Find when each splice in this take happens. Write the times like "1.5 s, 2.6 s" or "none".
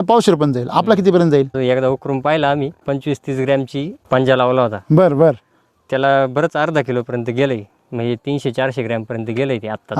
1.6 s, 2.8 s, 4.0 s